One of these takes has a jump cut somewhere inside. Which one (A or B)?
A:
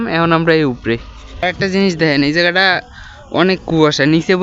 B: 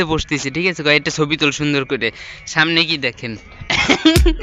A